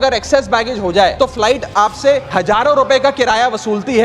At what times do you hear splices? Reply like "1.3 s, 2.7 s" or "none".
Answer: 1.1 s, 2.3 s